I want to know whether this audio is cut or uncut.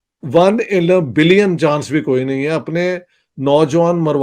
uncut